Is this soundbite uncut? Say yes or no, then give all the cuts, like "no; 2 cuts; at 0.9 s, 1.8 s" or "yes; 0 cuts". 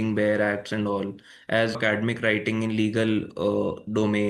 no; 1 cut; at 1.8 s